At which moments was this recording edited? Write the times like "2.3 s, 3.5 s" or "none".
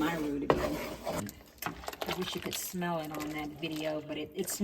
1.2 s